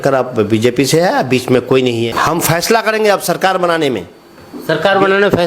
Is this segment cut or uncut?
cut